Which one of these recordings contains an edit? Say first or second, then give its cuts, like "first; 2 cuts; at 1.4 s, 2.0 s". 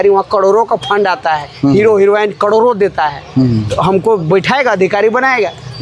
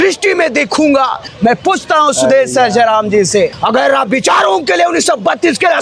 second; 2 cuts; at 1.2 s, 3.6 s